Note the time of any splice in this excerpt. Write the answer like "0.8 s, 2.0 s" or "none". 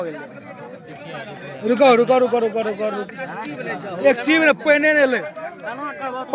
3.0 s

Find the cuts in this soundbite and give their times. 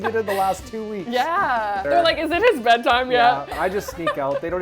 1.9 s, 3.6 s

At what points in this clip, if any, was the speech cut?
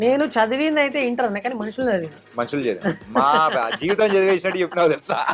2.2 s

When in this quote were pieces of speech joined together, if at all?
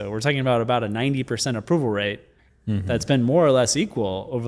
none

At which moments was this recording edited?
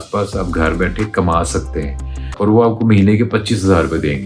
2.3 s

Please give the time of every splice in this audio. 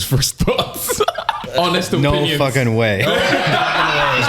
1.4 s

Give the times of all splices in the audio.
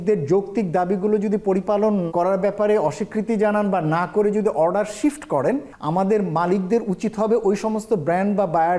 2.1 s, 5.7 s

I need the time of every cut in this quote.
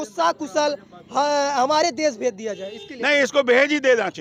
none

